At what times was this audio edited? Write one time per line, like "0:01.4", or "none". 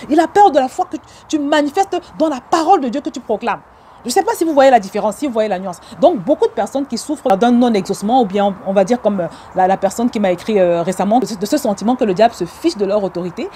0:07.3
0:11.2